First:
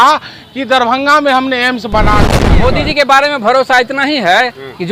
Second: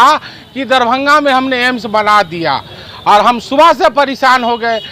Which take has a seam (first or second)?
first